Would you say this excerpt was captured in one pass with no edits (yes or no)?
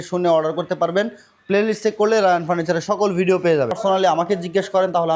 no